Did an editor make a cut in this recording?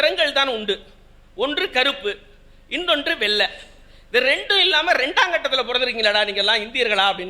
no; 0 cuts

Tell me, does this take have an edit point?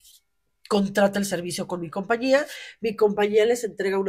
no; 0 cuts

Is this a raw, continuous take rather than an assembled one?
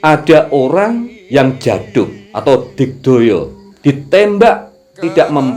no; 3 cuts; at 1.1 s, 2.2 s, 3.6 s

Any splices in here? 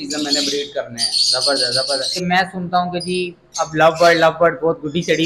yes; 1 cut; at 2.2 s

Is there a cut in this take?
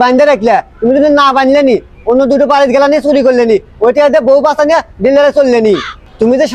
no; 0 cuts

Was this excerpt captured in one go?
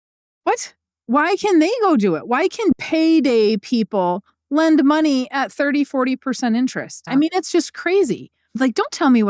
no; 3 cuts; at 2.8 s, 7.0 s, 8.5 s

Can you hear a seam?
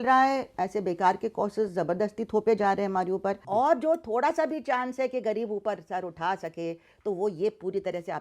yes; 1 cut; at 3.4 s

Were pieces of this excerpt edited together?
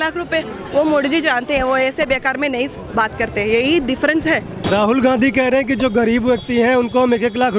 yes; 1 cut; at 4.5 s

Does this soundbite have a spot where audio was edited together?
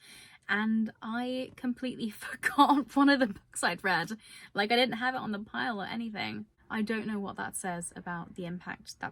yes; 1 cut; at 6.5 s

